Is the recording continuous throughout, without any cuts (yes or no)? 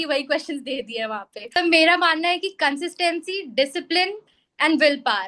no